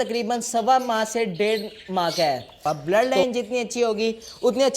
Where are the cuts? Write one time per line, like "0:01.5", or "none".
0:02.6

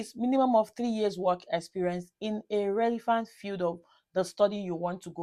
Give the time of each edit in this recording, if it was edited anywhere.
none

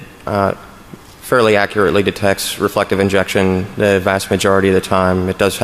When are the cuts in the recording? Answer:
none

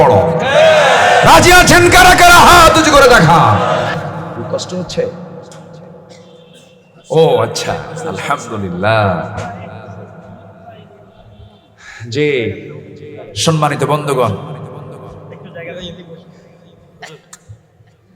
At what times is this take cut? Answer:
0:04.4

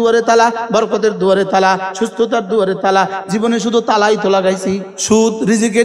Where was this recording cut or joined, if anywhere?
0:04.9

